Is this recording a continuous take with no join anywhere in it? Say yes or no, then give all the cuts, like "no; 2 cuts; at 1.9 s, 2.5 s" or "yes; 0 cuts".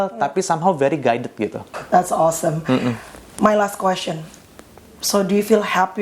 no; 1 cut; at 1.8 s